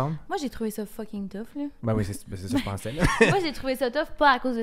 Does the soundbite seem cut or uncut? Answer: uncut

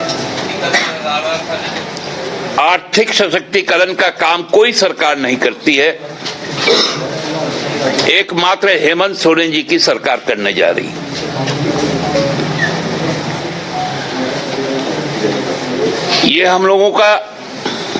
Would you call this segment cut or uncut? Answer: uncut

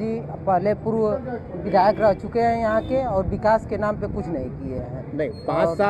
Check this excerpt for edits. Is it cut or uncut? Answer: uncut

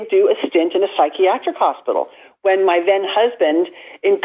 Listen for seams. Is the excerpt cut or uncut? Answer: uncut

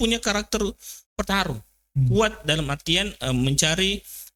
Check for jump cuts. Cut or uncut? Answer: uncut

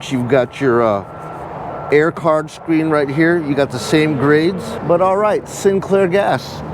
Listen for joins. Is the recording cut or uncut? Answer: cut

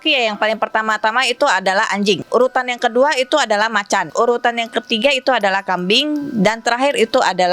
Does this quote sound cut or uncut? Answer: cut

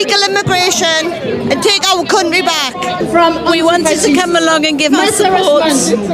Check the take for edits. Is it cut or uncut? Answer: uncut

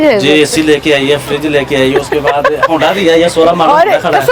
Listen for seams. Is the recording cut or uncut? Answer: uncut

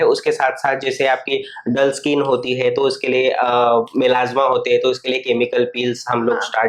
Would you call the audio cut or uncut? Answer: uncut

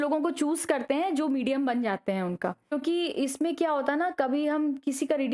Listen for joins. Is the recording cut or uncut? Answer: cut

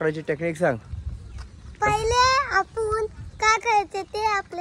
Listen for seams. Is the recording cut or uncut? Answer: uncut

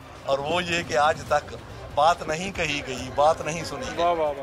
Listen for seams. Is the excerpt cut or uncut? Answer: uncut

